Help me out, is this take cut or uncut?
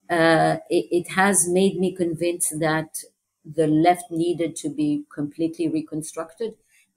cut